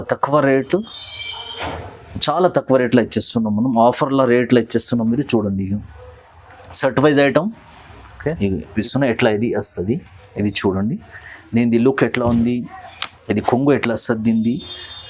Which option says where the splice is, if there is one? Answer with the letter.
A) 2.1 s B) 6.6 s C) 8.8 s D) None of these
C